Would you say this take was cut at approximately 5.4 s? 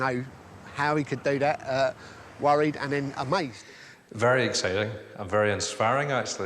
no; 1 cut; at 3.6 s

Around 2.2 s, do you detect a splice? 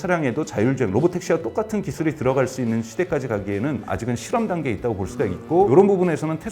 no; 2 cuts; at 3.9 s, 5.7 s

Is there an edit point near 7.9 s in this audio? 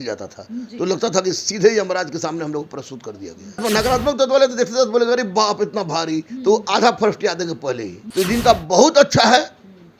yes; 2 cuts; at 3.6 s, 7.9 s

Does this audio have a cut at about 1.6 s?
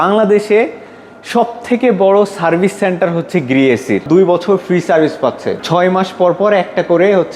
no; 2 cuts; at 4.1 s, 5.6 s

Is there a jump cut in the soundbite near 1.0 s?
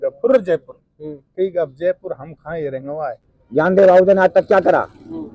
no; 1 cut; at 3.3 s

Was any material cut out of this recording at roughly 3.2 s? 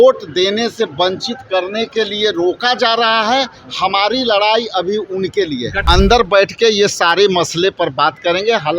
no; 1 cut; at 5.8 s

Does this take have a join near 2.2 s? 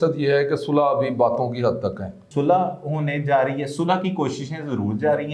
yes; 1 cut; at 2.2 s

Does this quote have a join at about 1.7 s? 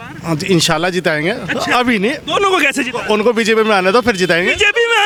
no; 0 cuts

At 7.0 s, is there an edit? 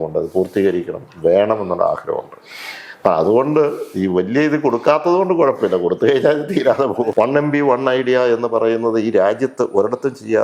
yes; 1 cut; at 7.0 s

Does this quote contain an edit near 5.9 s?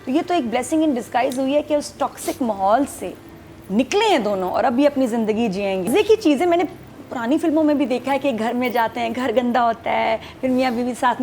yes; 1 cut; at 5.9 s

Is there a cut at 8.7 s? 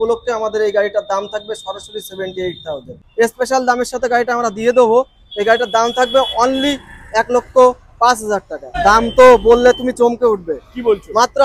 yes; 2 cuts; at 3.0 s, 8.7 s

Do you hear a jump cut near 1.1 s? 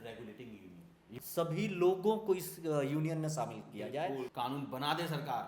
yes; 2 cuts; at 1.1 s, 4.3 s

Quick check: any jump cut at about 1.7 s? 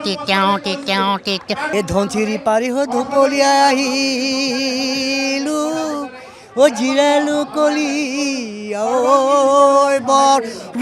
yes; 1 cut; at 1.7 s

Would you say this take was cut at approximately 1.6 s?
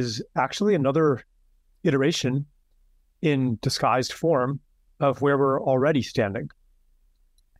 no; 0 cuts

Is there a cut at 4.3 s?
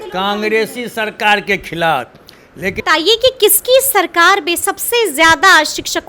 no; 1 cut; at 2.8 s

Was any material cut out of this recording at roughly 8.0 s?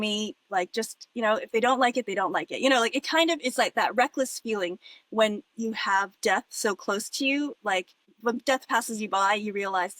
yes; 1 cut; at 8.0 s

